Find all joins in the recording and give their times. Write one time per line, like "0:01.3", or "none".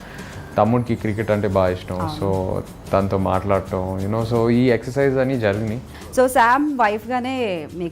0:06.0